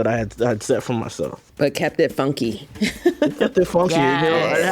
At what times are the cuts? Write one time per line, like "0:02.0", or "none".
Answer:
0:01.4

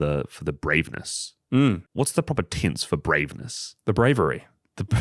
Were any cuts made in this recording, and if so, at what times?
0:01.8

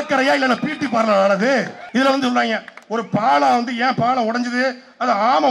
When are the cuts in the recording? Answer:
0:01.8

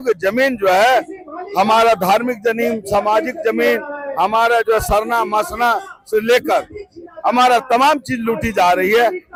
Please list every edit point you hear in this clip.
none

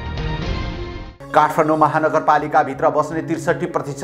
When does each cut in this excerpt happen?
0:01.1

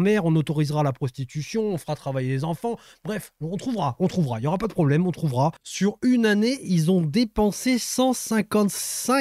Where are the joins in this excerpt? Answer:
0:05.6

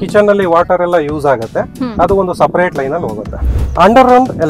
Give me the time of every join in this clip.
0:03.6

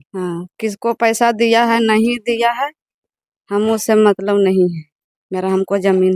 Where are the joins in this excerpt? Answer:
none

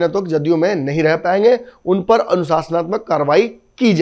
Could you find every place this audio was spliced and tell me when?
none

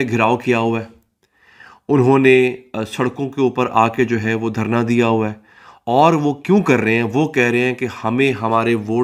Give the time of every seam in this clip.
none

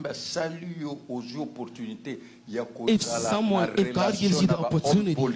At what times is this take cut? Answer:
none

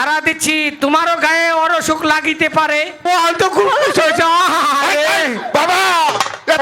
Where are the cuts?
0:03.0

